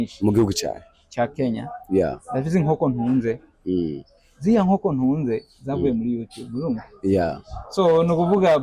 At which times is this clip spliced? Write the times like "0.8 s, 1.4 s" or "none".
none